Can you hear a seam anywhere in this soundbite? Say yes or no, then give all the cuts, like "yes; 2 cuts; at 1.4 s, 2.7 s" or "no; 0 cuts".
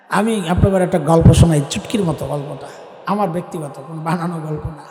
no; 0 cuts